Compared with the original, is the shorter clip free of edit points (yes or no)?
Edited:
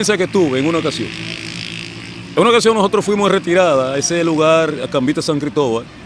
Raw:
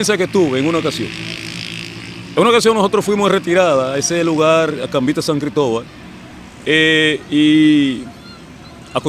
yes